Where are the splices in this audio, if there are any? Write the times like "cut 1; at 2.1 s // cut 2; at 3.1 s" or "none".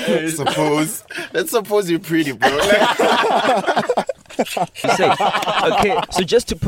cut 1; at 4.8 s